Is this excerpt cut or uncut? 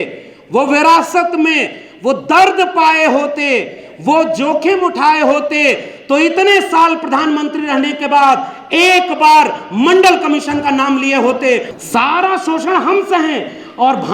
cut